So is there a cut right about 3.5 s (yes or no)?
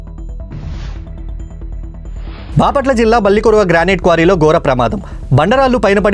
no